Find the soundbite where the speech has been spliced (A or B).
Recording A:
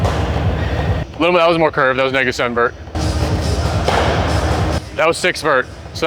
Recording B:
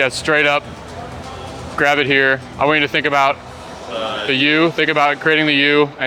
A